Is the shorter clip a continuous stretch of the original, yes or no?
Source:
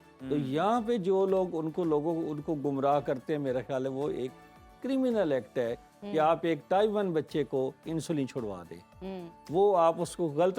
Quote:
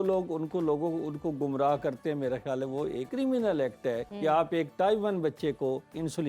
no